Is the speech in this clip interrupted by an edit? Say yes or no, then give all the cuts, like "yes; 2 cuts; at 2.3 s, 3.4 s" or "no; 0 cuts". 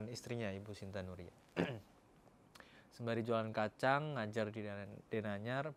no; 0 cuts